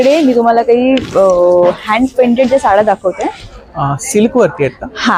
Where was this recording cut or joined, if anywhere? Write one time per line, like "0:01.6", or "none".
none